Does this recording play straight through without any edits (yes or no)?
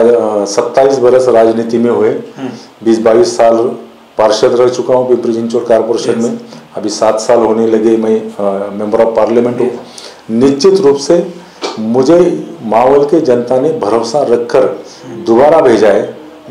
yes